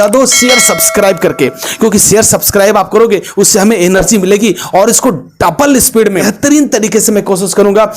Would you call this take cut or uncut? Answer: cut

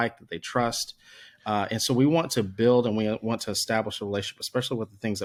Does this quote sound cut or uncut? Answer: uncut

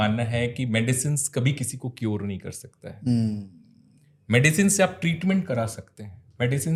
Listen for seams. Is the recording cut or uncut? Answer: uncut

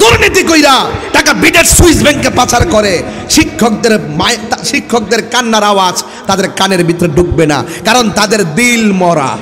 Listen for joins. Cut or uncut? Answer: uncut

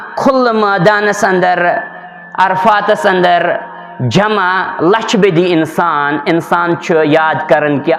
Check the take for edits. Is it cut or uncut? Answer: uncut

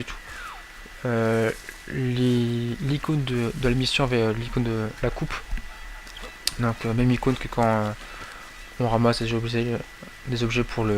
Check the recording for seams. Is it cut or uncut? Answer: cut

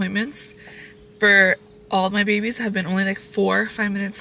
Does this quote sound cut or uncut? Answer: uncut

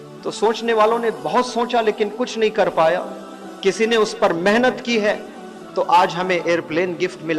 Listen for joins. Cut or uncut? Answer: uncut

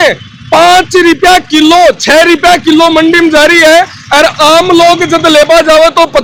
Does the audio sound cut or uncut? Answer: uncut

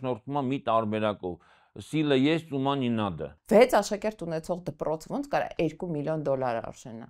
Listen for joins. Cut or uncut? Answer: cut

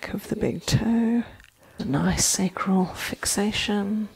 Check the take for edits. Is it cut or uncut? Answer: cut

